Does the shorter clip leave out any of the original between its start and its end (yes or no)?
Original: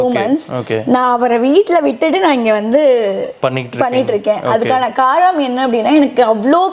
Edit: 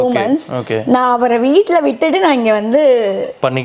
no